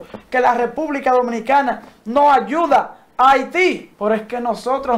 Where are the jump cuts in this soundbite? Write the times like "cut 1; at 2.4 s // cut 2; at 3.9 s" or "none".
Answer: cut 1; at 3.9 s